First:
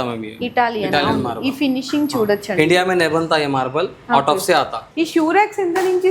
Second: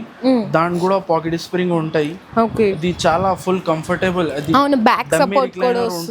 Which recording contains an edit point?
first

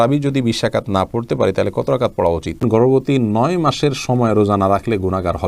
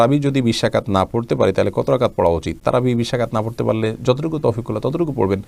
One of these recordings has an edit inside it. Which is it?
first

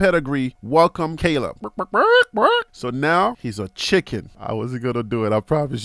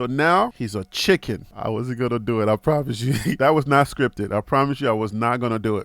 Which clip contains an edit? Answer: first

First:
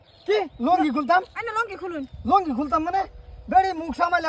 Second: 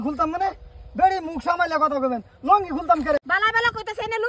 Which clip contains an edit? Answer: second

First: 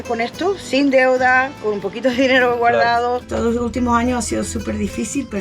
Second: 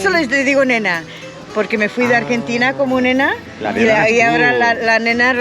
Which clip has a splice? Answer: first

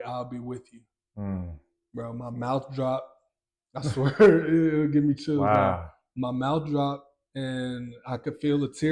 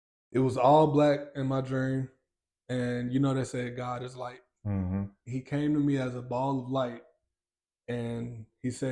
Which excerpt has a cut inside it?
second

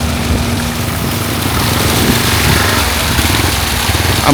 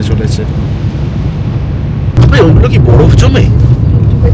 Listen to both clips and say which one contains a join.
second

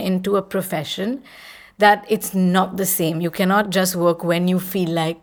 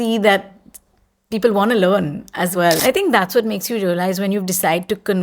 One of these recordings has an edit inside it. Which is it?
second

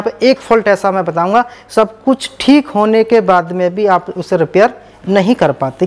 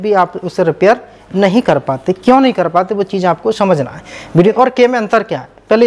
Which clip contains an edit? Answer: second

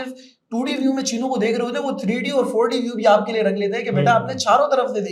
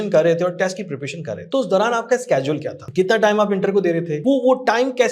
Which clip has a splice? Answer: second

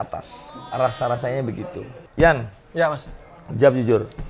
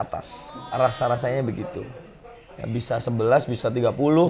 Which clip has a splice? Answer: first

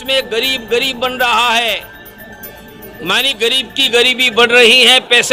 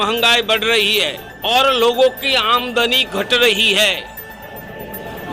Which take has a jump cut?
second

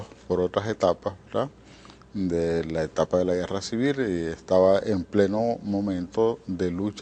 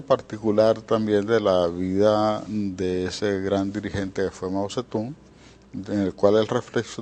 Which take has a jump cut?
first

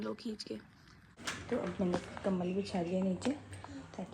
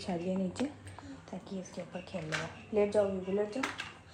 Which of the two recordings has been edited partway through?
first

